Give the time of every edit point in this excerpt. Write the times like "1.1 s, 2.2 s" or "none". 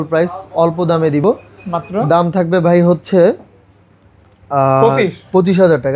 none